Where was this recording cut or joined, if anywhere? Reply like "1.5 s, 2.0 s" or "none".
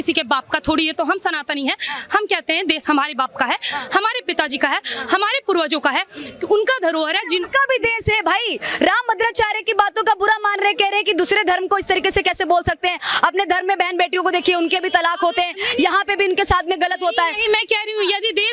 none